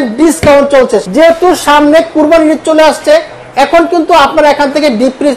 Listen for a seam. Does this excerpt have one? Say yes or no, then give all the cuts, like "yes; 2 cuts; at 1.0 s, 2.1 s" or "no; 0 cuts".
yes; 1 cut; at 1.0 s